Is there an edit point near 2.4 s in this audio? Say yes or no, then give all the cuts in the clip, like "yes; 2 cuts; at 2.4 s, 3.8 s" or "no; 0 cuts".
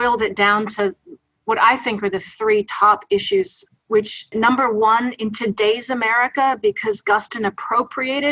no; 1 cut; at 4.3 s